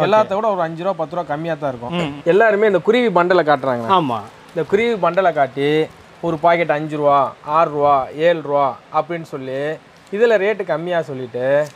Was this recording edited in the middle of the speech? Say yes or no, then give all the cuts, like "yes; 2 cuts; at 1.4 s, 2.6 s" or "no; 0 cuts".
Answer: yes; 1 cut; at 2.1 s